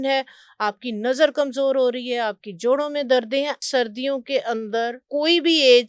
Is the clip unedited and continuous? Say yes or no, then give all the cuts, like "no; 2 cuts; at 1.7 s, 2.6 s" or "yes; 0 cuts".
no; 2 cuts; at 3.6 s, 5.0 s